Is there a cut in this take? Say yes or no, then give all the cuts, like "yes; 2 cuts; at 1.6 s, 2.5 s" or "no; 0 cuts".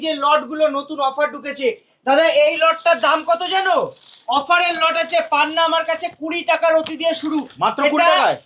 no; 0 cuts